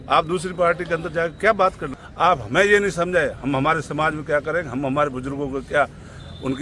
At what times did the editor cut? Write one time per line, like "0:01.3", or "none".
0:01.9

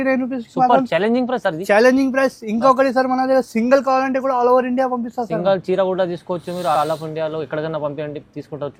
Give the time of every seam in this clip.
none

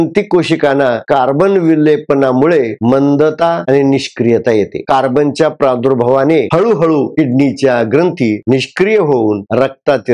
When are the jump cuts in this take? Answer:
0:01.0
0:04.8

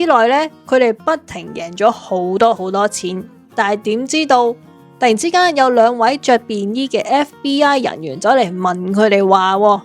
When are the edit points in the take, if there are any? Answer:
none

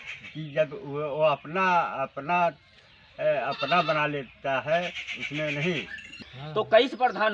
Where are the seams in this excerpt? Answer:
0:06.2

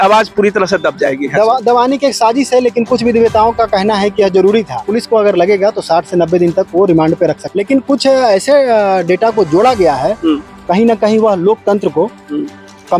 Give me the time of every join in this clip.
0:04.8
0:07.4

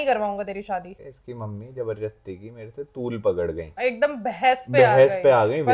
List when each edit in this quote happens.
0:00.9
0:03.7

